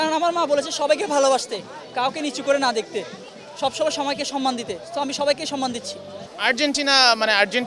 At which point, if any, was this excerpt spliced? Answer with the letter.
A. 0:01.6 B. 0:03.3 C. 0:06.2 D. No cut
C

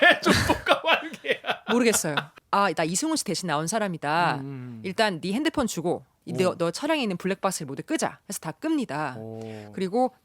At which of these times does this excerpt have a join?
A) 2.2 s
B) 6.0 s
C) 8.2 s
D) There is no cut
A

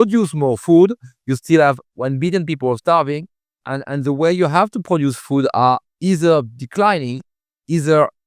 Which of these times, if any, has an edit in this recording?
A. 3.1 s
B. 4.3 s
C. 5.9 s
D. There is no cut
D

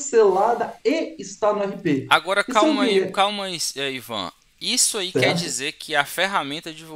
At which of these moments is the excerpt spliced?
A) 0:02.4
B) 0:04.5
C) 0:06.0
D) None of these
D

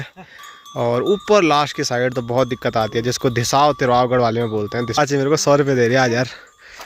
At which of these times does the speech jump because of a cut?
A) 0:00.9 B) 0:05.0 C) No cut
B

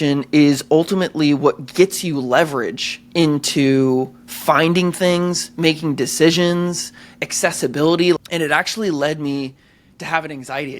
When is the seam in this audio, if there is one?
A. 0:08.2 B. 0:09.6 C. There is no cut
A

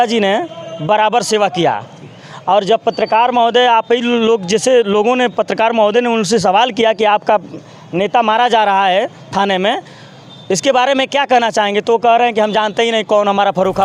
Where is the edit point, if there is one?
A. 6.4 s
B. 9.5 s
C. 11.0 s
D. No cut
D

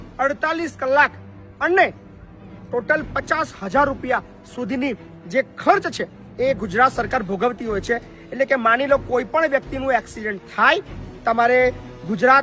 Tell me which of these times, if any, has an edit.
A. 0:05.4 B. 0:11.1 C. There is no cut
C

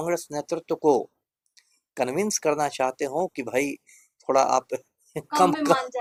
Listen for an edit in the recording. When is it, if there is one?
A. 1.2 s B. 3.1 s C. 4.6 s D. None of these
D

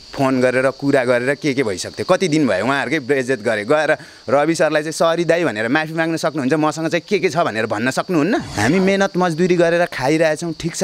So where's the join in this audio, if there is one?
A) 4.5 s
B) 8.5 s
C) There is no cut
B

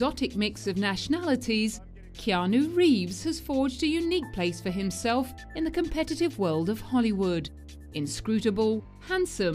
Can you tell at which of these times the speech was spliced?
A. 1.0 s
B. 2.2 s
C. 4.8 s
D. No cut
D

